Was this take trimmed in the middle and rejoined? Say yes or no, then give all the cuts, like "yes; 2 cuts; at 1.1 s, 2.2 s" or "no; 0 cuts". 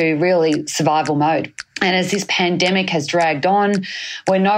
yes; 1 cut; at 1.7 s